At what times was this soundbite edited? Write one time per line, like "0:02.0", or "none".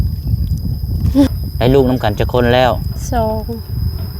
0:01.3